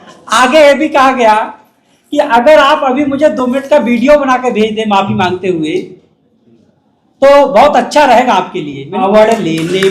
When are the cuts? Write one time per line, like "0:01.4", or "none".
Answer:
0:09.0